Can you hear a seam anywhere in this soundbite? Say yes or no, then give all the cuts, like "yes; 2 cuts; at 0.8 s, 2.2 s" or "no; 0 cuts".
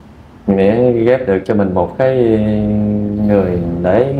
no; 0 cuts